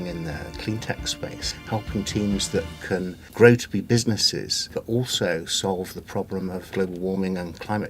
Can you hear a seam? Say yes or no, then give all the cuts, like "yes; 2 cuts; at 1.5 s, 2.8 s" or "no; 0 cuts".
yes; 4 cuts; at 1.5 s, 3.2 s, 4.7 s, 6.7 s